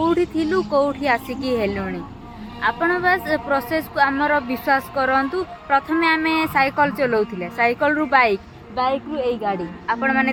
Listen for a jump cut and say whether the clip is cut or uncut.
uncut